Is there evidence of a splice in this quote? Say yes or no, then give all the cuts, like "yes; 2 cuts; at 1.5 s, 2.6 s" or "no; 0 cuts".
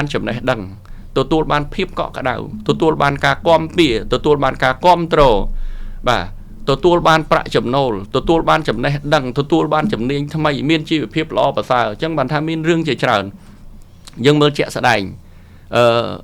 no; 0 cuts